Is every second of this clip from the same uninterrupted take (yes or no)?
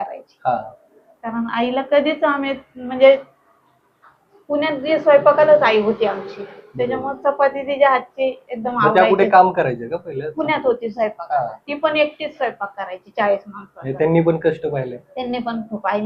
yes